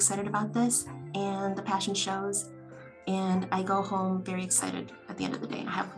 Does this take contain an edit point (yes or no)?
no